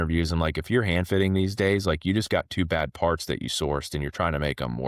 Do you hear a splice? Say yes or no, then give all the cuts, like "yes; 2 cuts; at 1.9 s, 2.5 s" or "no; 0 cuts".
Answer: no; 0 cuts